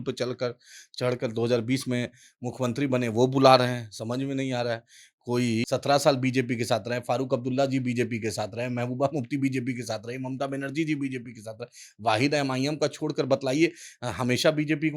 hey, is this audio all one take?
no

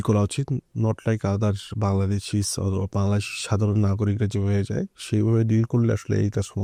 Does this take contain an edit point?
no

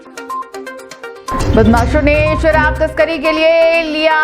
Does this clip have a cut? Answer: yes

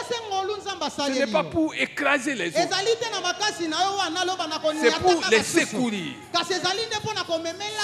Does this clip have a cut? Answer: no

